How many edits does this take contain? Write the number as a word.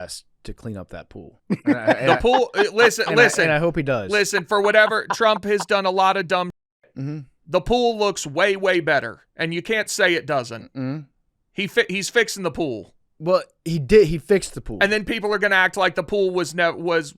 one